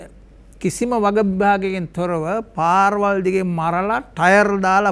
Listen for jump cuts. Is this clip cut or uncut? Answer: uncut